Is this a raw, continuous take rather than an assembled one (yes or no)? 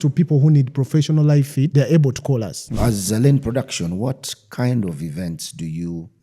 no